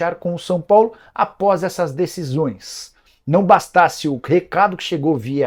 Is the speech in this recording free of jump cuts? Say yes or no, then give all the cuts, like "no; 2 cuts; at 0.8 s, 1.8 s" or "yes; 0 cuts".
yes; 0 cuts